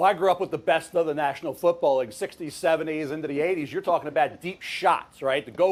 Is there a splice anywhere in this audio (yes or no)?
no